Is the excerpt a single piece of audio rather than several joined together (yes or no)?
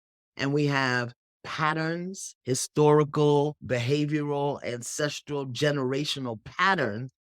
no